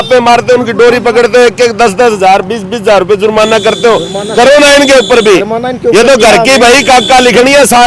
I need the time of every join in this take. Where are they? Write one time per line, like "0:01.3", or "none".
none

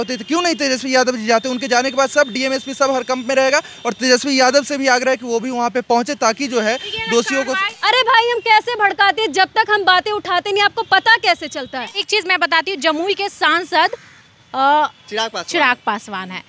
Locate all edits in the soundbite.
0:07.7
0:12.0

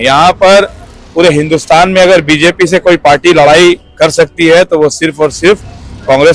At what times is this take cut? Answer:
none

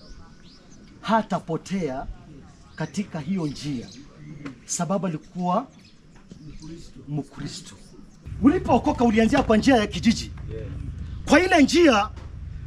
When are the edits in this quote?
0:08.2

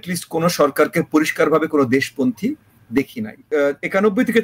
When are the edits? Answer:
0:03.5

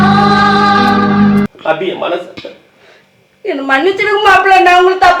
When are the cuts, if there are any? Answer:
0:01.5

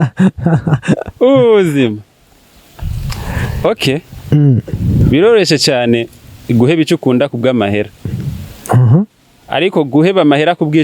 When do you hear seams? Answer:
none

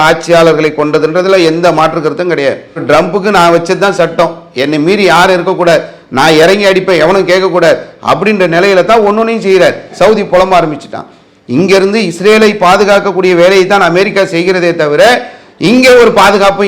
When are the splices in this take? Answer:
0:02.8
0:09.9

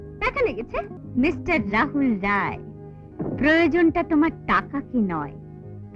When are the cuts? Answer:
0:01.0

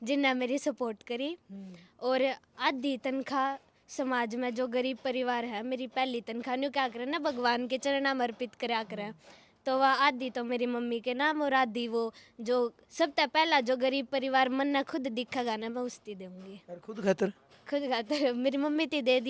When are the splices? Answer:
none

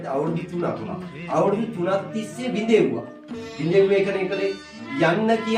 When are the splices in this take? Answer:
none

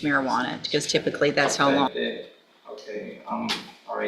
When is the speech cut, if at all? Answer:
0:01.9

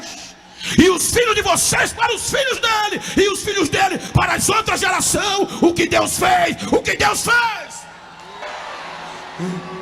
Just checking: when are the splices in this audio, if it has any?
0:08.4

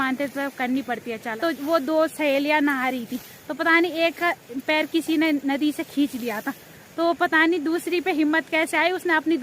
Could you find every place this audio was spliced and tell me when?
0:01.3

